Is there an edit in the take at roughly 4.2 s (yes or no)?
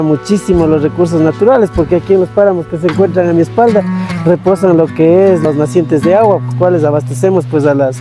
no